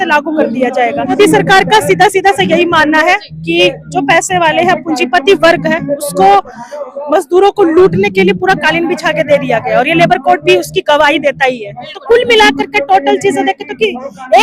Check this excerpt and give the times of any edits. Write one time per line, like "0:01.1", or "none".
0:01.1
0:11.9